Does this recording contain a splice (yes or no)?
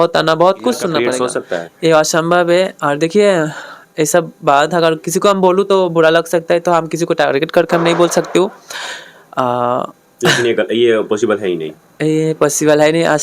yes